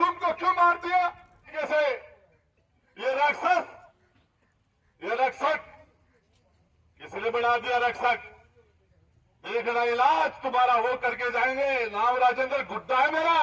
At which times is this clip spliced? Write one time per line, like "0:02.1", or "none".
0:01.8

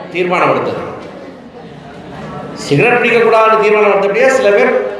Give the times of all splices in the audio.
none

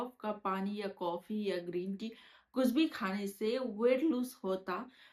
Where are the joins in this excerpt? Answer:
none

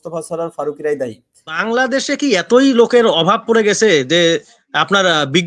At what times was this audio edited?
0:01.6

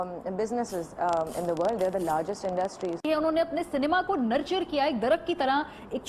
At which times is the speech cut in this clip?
0:03.0

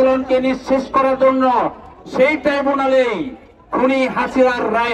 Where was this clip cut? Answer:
none

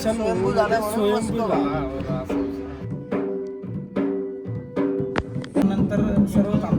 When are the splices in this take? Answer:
0:05.6

